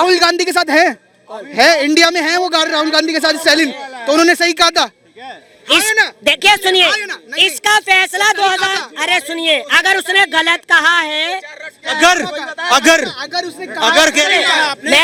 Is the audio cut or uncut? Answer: uncut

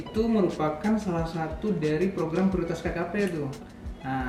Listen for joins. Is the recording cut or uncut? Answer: uncut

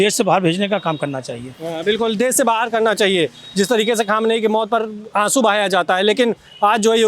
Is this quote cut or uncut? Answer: uncut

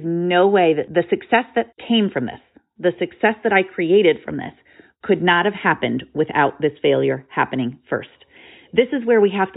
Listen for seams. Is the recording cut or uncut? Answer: cut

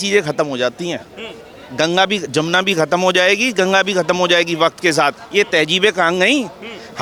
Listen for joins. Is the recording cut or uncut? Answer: uncut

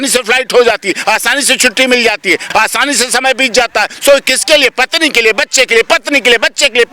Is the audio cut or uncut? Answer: cut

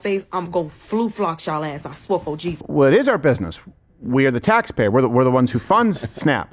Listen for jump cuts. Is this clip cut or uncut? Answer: cut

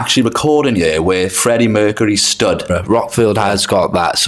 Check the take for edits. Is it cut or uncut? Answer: cut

